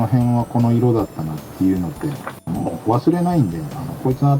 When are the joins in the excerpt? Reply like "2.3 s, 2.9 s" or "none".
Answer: 2.4 s